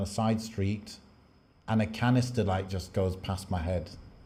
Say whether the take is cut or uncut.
uncut